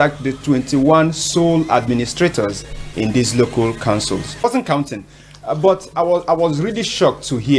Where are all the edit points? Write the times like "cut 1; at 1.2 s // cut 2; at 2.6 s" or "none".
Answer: cut 1; at 4.4 s

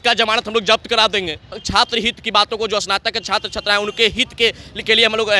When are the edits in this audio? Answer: cut 1; at 1.6 s

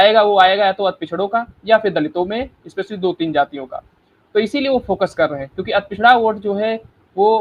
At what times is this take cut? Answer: none

